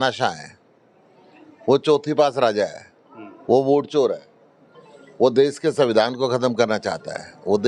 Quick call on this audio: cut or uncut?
uncut